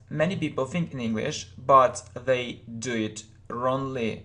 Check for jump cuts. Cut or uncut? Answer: cut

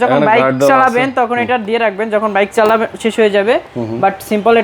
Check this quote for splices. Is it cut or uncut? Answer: uncut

